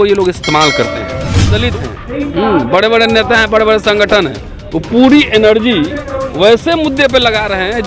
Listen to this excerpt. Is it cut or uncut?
cut